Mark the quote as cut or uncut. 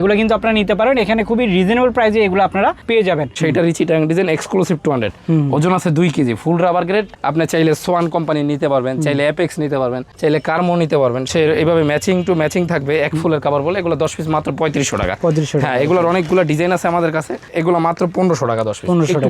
cut